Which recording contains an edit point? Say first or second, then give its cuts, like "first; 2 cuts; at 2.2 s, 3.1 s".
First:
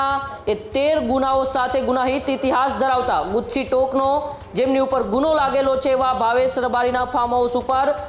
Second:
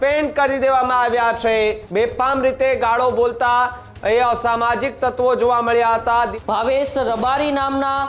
second; 2 cuts; at 1.8 s, 6.3 s